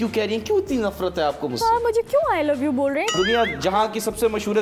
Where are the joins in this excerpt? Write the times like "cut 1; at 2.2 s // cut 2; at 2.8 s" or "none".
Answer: cut 1; at 3.1 s